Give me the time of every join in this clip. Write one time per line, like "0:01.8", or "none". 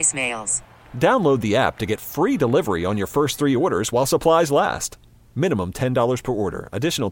none